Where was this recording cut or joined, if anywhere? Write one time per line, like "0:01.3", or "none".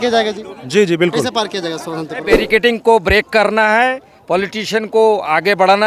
0:02.3